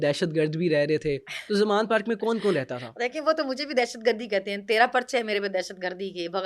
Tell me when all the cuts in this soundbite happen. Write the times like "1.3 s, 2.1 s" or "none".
none